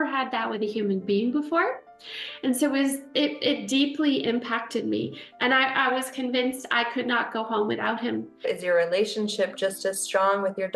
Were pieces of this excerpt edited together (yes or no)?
yes